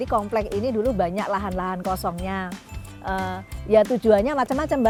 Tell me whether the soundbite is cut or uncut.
uncut